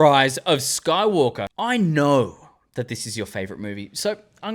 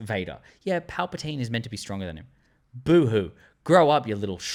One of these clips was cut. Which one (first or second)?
first